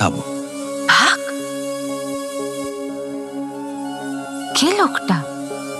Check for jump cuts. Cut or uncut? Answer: cut